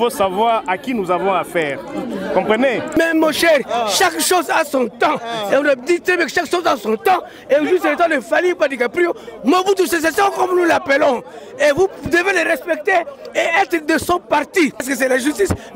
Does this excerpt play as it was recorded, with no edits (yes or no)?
no